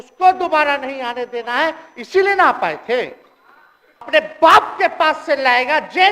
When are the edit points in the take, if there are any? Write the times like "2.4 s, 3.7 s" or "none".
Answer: 4.1 s